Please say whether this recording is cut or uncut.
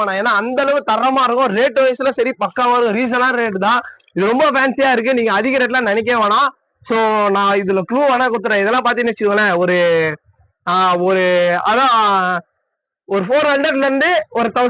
uncut